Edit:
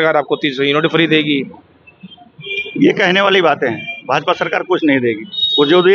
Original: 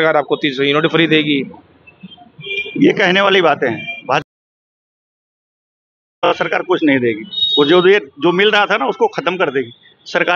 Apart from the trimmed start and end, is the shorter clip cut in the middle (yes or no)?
yes